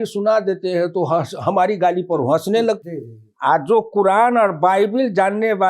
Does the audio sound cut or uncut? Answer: cut